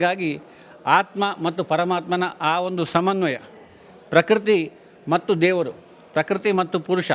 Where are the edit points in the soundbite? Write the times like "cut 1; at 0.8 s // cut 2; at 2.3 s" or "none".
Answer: none

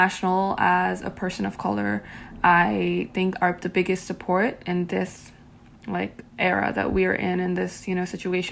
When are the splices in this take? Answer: none

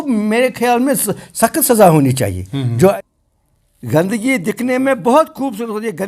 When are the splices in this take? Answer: cut 1; at 2.9 s

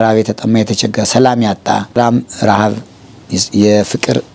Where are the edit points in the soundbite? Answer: cut 1; at 2.0 s

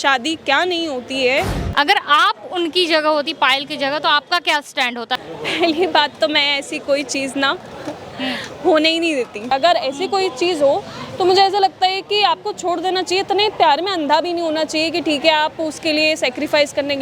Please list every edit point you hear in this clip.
cut 1; at 1.6 s // cut 2; at 5.2 s // cut 3; at 9.5 s

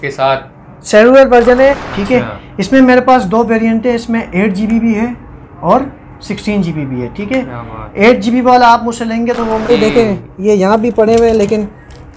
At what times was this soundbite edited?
cut 1; at 1.8 s // cut 2; at 9.7 s

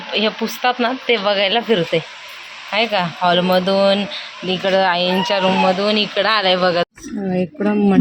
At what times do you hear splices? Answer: cut 1; at 6.9 s

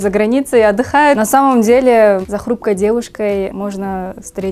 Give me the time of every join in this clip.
cut 1; at 1.2 s // cut 2; at 2.3 s // cut 3; at 3.5 s

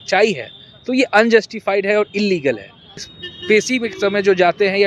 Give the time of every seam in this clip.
cut 1; at 3.1 s

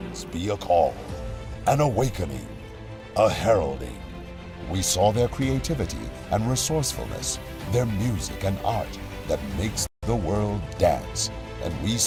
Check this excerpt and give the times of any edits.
none

